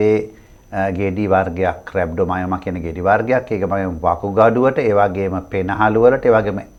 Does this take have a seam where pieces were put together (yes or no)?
no